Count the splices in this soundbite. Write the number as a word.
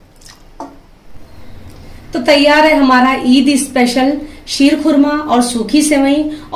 one